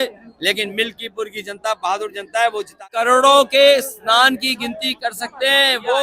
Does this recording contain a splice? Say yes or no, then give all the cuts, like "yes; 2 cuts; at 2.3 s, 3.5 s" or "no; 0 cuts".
yes; 1 cut; at 2.9 s